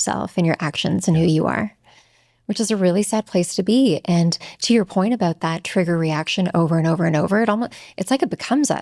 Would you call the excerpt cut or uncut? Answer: uncut